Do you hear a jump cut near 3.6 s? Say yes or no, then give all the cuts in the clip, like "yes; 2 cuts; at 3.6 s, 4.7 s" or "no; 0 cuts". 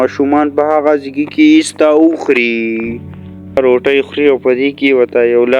yes; 1 cut; at 3.6 s